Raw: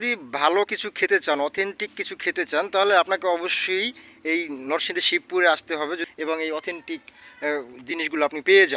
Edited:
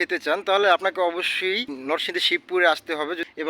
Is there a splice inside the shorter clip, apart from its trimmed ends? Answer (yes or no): yes